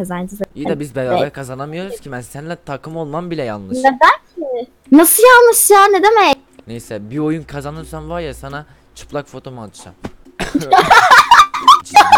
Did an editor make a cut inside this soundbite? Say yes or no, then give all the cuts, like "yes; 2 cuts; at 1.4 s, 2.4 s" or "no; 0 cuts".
no; 0 cuts